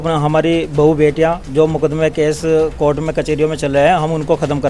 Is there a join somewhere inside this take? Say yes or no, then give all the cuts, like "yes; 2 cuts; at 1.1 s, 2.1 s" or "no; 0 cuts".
no; 0 cuts